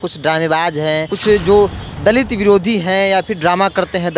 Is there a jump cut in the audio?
yes; 1 cut; at 1.1 s

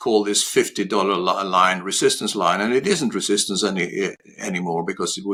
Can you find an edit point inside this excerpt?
no; 0 cuts

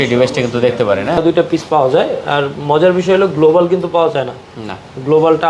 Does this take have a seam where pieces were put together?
yes; 1 cut; at 1.2 s

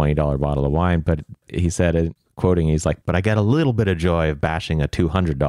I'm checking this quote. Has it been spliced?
yes; 1 cut; at 2.1 s

